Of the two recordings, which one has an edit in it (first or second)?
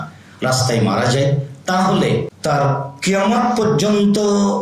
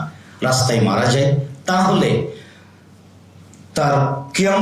first